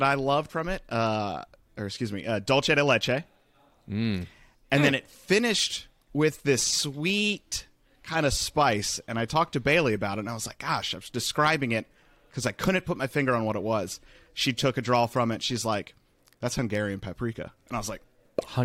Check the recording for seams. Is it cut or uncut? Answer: uncut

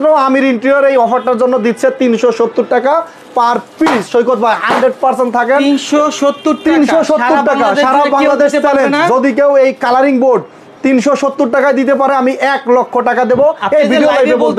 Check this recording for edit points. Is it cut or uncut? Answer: uncut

